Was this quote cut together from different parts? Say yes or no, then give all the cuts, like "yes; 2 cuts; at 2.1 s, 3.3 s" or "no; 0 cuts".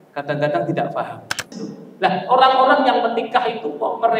yes; 1 cut; at 1.6 s